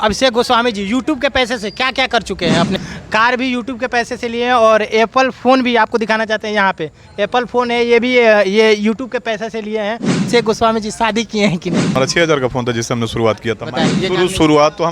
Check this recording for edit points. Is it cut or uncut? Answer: cut